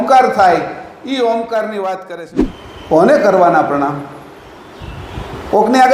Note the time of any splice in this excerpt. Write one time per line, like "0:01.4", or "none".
0:02.1